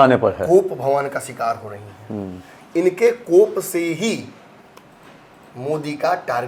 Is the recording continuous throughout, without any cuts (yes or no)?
yes